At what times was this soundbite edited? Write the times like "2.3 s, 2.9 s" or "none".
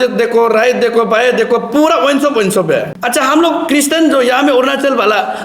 2.9 s